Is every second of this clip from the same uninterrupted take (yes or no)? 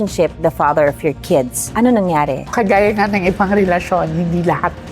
no